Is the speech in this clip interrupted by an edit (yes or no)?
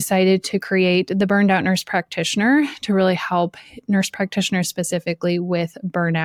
no